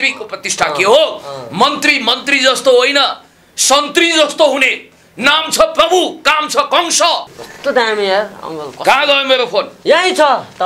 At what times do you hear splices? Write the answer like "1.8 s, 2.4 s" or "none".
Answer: 7.4 s